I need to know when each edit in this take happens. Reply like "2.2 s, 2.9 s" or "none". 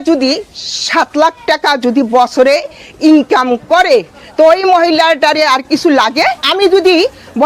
6.5 s

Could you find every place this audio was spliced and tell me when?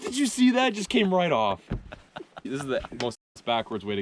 2.5 s

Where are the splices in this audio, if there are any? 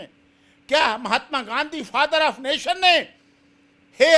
none

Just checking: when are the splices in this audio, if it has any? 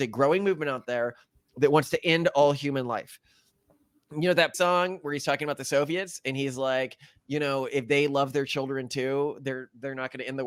none

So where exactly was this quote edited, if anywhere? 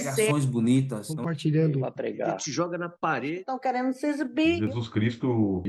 none

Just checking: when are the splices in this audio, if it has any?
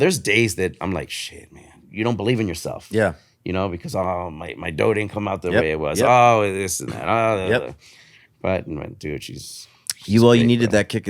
1.8 s

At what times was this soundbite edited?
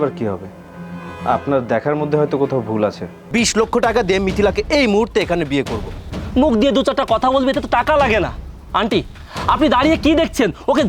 3.3 s, 6.0 s

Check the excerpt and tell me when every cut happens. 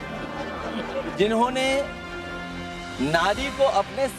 1.2 s

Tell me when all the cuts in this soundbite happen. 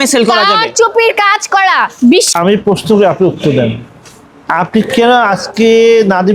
2.3 s

